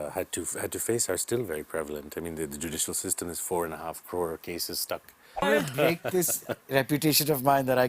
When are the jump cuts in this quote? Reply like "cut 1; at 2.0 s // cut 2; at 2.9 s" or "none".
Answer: cut 1; at 5.4 s